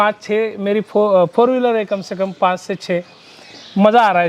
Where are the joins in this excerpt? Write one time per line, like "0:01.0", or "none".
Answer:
none